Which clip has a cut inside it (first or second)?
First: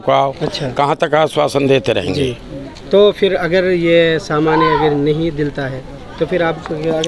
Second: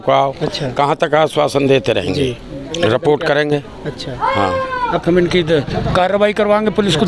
second